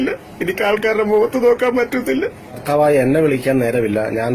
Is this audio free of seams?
no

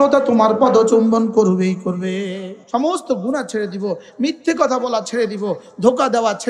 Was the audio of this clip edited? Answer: yes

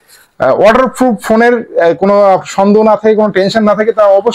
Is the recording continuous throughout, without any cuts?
yes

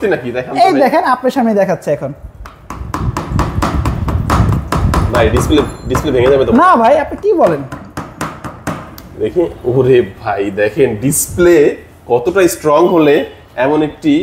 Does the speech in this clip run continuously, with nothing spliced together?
yes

